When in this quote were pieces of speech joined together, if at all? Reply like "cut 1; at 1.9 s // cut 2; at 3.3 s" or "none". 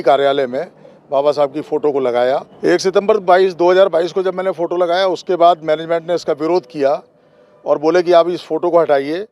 cut 1; at 2.5 s